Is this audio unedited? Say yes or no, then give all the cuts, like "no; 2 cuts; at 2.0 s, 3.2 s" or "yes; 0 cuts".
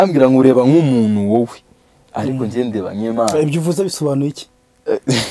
yes; 0 cuts